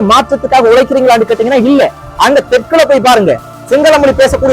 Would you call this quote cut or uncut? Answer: cut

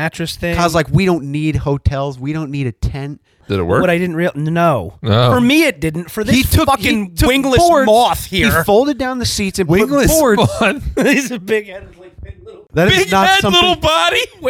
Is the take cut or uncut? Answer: cut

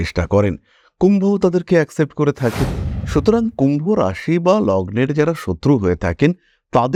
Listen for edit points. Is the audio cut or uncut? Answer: uncut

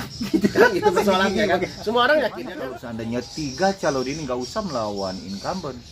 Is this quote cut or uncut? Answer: cut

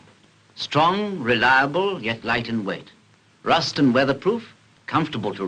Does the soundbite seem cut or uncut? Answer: uncut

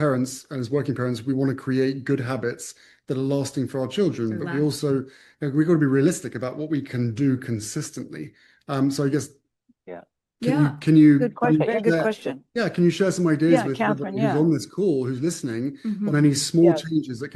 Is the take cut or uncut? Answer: uncut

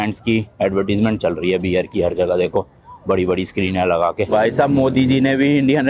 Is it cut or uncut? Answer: uncut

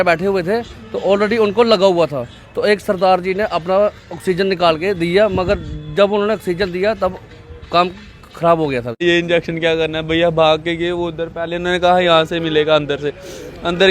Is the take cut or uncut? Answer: cut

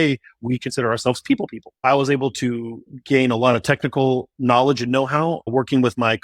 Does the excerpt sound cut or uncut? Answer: cut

